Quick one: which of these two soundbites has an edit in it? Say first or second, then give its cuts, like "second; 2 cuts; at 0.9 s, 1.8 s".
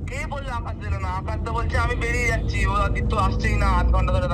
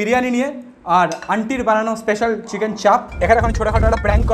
second; 1 cut; at 3.2 s